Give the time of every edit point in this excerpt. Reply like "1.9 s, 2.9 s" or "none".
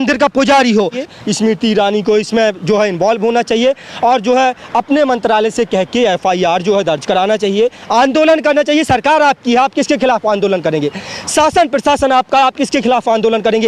1.0 s